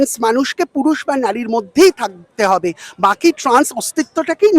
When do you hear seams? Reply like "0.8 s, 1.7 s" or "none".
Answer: none